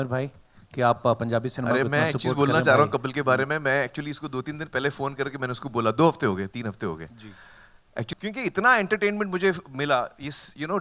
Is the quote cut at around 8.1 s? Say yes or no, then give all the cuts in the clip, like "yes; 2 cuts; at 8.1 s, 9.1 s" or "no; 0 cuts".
yes; 1 cut; at 8.1 s